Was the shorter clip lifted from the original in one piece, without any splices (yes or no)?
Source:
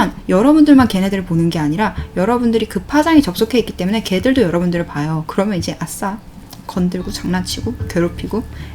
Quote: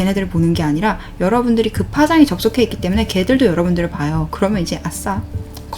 yes